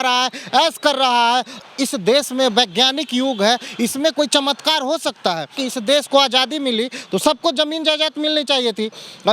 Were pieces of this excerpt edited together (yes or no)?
yes